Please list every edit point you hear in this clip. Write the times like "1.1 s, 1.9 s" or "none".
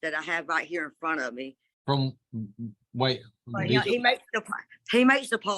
1.6 s